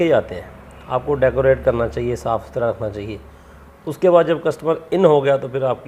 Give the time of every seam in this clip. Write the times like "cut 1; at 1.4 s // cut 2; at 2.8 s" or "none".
none

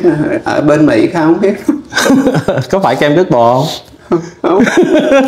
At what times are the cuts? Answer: none

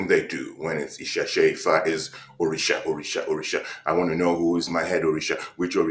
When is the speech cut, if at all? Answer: none

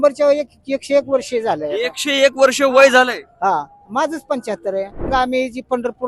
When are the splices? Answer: cut 1; at 5.1 s

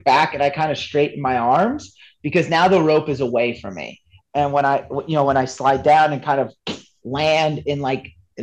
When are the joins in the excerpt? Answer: cut 1; at 4.1 s

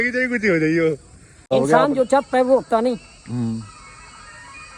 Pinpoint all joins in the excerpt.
cut 1; at 1.5 s

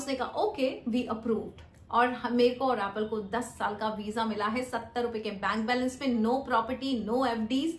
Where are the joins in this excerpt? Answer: none

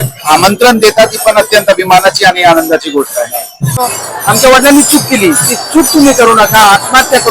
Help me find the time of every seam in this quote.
cut 1; at 3.8 s

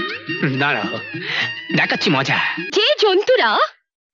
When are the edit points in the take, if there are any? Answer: cut 1; at 2.6 s

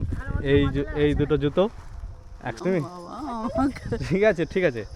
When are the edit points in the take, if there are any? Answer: cut 1; at 2.5 s

